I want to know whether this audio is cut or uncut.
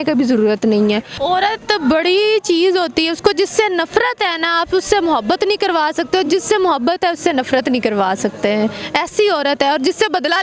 cut